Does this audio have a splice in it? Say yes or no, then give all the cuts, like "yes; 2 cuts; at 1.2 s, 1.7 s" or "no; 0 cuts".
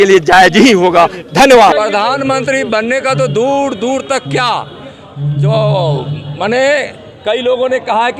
yes; 1 cut; at 1.7 s